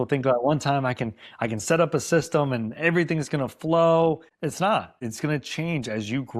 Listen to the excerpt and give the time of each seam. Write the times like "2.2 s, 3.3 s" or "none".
4.3 s, 5.0 s